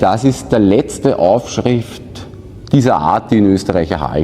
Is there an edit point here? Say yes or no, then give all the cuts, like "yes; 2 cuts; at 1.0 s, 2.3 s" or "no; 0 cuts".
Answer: no; 0 cuts